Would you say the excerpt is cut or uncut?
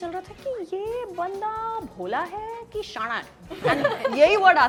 uncut